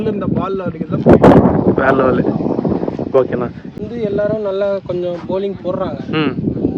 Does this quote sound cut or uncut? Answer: uncut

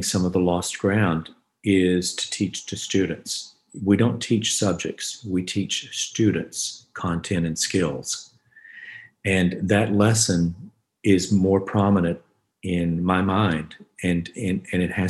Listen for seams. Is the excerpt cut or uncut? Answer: uncut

